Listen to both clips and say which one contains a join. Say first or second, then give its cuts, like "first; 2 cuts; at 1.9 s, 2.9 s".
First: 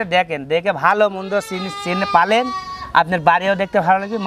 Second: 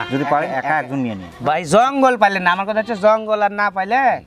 second; 1 cut; at 1.3 s